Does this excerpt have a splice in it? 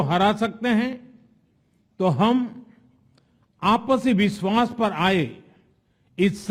no; 0 cuts

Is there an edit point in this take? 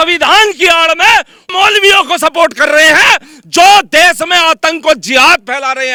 no; 0 cuts

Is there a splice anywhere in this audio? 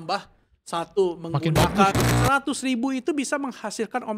yes; 1 cut; at 2.0 s

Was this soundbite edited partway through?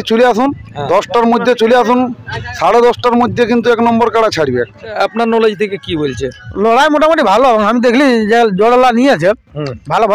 yes; 1 cut; at 5.0 s

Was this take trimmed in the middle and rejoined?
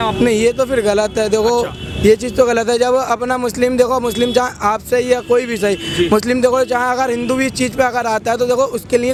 no; 0 cuts

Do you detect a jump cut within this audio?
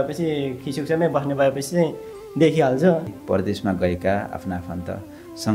yes; 1 cut; at 3.1 s

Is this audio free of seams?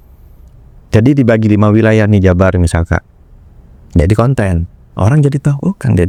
yes; 0 cuts

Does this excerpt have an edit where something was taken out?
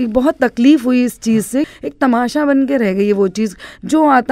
yes; 1 cut; at 1.7 s

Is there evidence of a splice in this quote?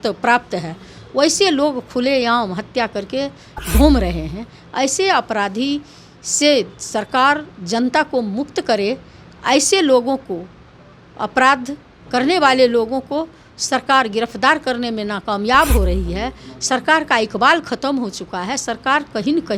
no; 0 cuts

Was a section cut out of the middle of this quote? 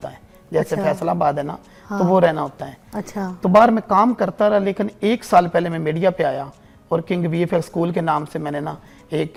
no; 0 cuts

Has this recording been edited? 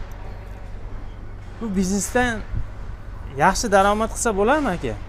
no; 0 cuts

